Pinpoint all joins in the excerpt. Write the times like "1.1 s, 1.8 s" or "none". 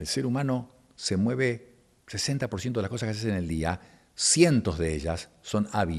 none

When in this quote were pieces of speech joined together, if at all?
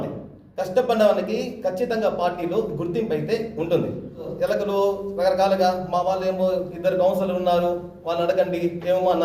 4.3 s

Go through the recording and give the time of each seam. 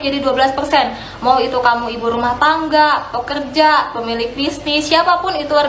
none

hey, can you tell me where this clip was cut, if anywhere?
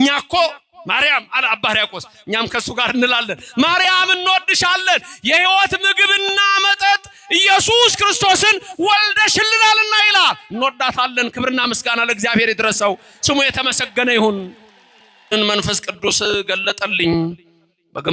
15.3 s

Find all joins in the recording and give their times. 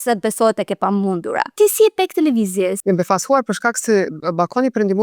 1.5 s, 2.8 s

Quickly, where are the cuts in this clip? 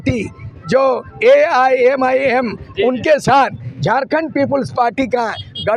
none

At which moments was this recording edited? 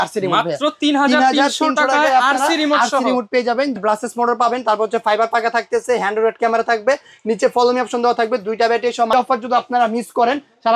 3.8 s, 9.1 s

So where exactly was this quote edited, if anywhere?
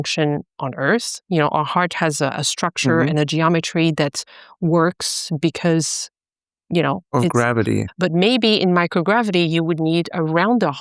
7.9 s

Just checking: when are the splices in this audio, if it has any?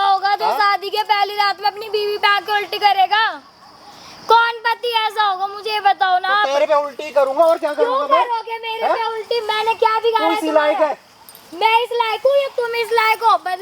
none

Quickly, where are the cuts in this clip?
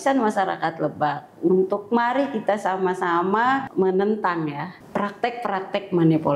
3.7 s, 4.7 s

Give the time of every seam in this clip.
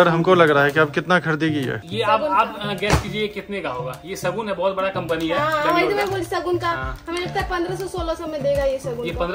1.8 s

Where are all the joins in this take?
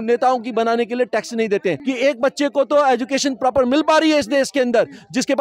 1.8 s

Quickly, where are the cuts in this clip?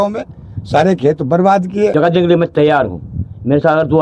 1.9 s

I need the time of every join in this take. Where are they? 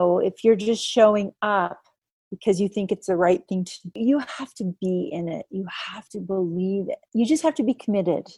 3.8 s, 7.0 s

